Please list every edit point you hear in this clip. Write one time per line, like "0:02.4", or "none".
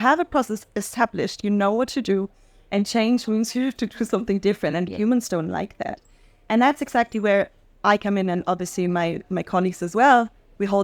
none